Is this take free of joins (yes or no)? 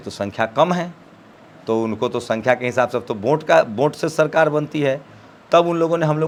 yes